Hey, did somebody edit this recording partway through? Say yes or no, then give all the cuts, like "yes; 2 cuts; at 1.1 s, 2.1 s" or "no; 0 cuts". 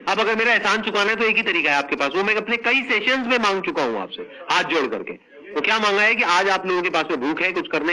no; 0 cuts